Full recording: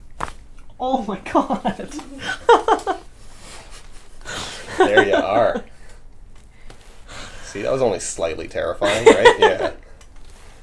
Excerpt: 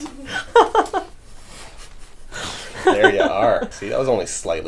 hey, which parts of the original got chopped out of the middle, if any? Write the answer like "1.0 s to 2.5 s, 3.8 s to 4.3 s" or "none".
5.7 s to 7.5 s